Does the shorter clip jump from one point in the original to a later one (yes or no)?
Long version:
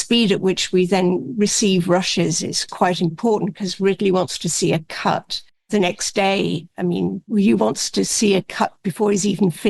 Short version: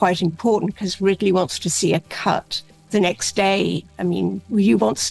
no